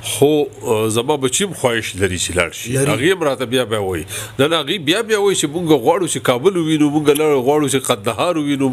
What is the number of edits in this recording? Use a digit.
0